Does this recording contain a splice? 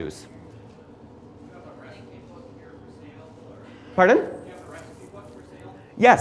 yes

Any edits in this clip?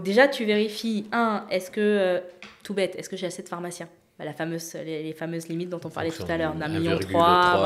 no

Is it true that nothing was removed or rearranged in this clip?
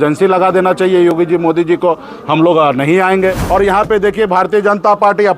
no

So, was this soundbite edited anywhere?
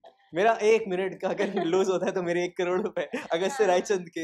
no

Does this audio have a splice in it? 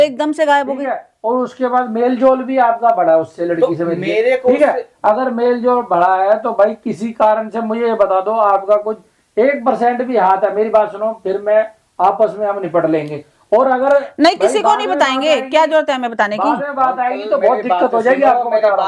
no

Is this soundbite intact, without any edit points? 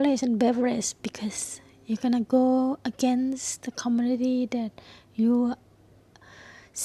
yes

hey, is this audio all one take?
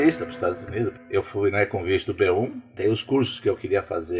no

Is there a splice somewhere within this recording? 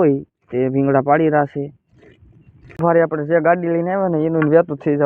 yes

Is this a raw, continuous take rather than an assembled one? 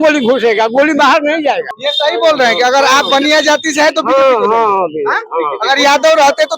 no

